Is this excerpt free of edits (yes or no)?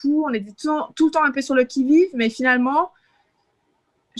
yes